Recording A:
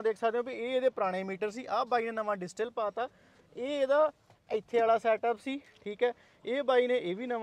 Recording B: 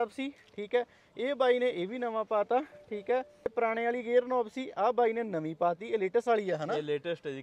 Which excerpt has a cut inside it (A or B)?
B